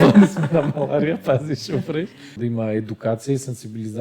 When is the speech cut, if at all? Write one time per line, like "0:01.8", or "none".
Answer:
0:02.3